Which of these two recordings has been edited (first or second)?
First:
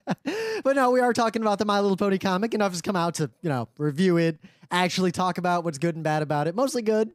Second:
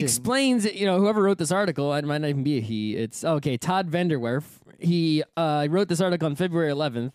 first